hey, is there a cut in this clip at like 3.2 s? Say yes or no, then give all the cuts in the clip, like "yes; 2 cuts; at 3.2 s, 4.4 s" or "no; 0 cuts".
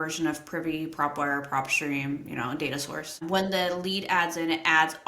yes; 1 cut; at 3.2 s